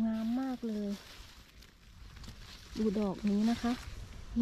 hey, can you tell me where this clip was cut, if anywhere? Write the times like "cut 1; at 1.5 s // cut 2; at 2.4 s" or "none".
none